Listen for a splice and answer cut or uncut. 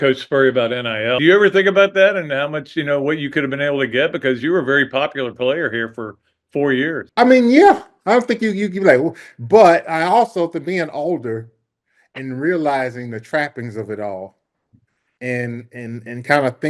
cut